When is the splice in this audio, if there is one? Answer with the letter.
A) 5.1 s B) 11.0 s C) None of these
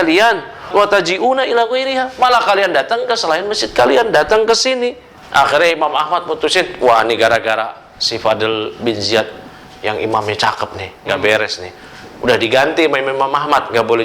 A